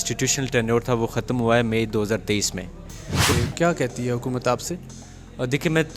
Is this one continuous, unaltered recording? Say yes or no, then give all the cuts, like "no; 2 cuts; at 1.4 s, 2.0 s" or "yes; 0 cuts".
no; 1 cut; at 3.3 s